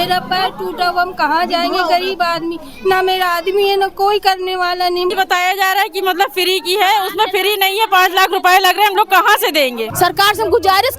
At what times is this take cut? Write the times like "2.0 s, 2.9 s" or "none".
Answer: 5.1 s, 9.8 s